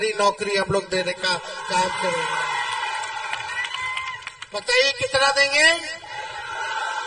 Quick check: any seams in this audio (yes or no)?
no